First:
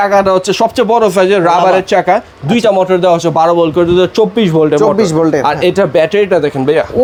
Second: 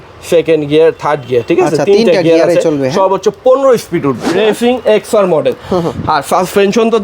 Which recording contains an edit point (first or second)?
second